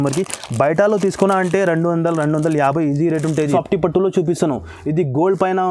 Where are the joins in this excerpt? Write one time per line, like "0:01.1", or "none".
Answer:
0:03.5

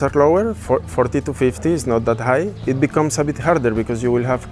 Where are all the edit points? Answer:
0:02.6

